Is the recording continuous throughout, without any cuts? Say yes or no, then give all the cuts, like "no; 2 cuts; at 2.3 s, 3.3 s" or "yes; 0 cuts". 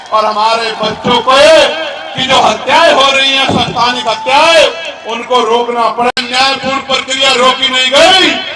no; 1 cut; at 6.1 s